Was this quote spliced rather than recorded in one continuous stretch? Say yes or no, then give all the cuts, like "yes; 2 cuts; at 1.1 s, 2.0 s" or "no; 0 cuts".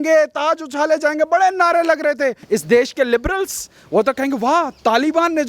yes; 1 cut; at 2.4 s